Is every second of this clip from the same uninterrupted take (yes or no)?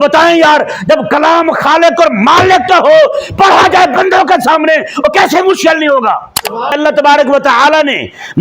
no